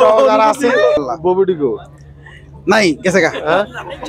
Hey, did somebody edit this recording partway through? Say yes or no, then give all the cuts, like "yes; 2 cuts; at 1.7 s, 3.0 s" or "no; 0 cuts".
yes; 1 cut; at 1.0 s